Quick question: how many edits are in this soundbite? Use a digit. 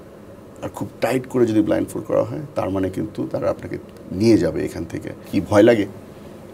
1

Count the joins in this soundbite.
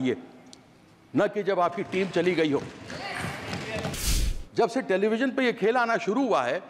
1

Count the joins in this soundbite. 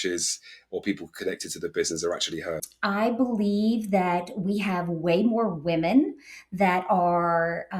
1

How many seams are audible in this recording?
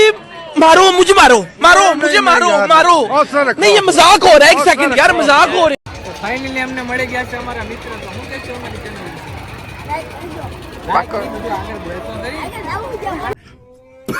2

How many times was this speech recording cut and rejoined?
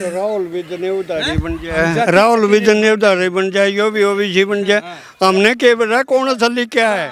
0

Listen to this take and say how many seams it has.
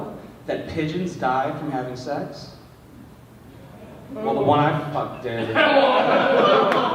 0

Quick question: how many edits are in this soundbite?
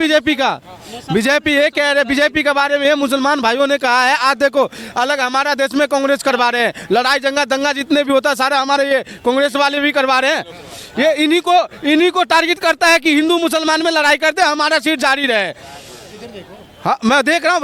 0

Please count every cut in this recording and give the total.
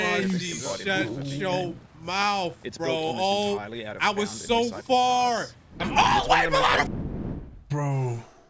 1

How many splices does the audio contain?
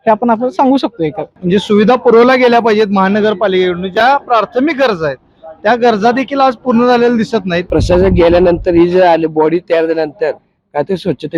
2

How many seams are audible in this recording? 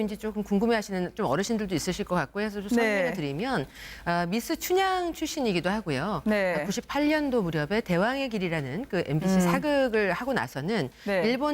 1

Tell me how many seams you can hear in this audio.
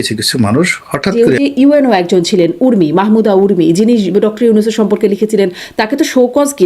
1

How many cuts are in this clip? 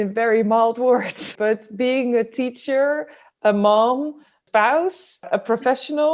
3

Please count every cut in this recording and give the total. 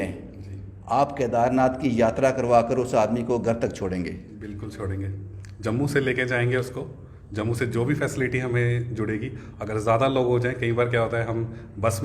0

